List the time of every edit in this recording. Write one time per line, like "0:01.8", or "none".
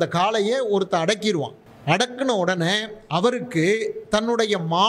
0:01.7